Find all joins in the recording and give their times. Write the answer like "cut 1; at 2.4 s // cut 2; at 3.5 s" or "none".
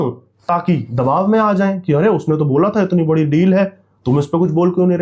none